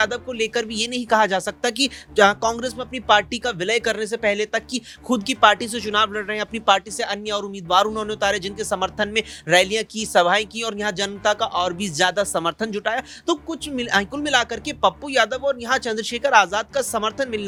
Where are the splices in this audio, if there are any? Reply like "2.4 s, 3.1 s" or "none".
none